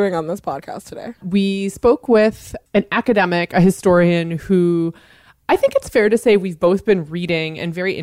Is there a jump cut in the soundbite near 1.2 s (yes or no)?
yes